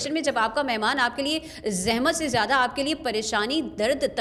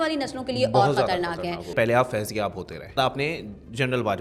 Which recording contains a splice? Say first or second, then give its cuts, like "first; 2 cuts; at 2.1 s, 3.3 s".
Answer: second; 2 cuts; at 1.7 s, 3.0 s